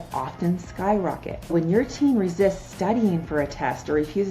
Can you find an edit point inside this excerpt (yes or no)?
yes